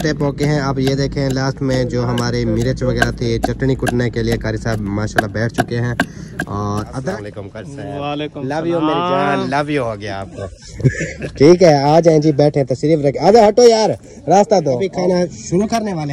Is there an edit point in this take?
yes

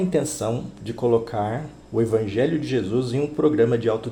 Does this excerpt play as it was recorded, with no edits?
yes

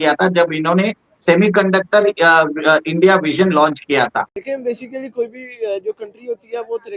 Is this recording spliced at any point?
yes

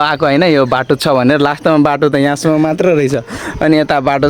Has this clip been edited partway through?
no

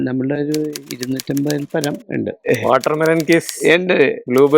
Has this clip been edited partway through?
yes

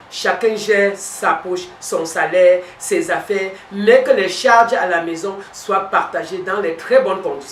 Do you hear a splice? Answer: no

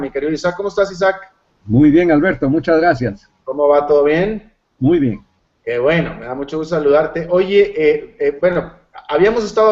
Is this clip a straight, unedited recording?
yes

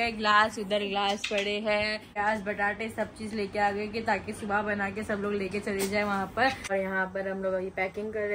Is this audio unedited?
no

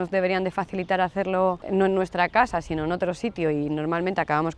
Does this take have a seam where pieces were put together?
yes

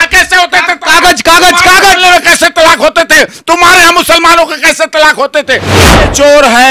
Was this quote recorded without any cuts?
no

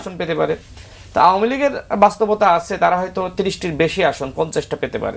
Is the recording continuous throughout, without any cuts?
yes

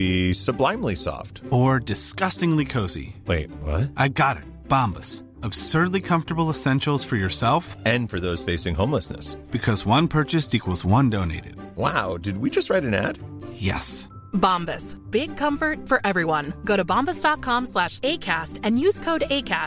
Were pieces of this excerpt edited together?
no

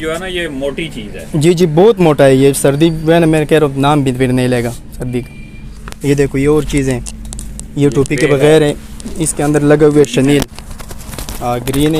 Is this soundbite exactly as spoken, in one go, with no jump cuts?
yes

